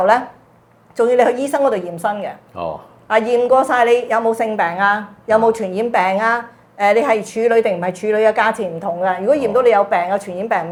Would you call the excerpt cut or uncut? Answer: uncut